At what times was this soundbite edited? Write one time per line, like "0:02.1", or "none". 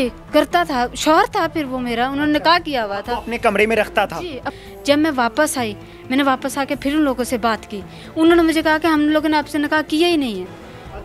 0:04.4